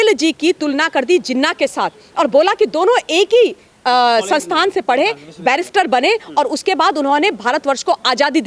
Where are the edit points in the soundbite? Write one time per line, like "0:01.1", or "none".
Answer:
none